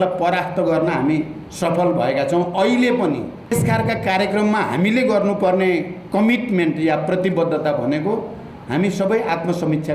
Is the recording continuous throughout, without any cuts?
no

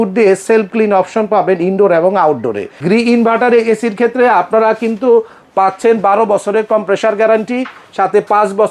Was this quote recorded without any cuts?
no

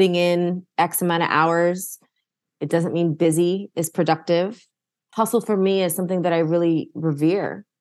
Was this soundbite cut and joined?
no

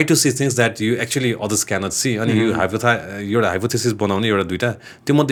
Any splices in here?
no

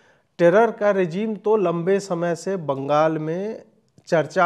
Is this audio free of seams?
yes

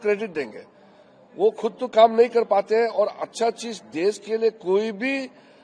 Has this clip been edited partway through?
no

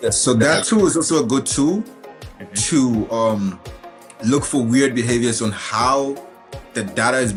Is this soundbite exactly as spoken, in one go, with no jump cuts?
yes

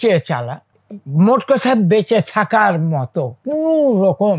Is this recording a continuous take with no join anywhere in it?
yes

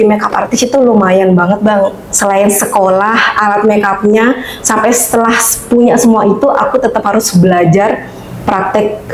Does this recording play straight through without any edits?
yes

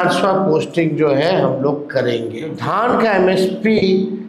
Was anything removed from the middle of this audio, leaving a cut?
yes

